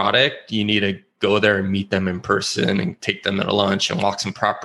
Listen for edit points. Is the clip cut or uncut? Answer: uncut